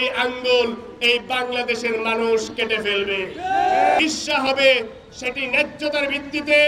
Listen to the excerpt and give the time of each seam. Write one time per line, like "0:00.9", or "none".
0:04.0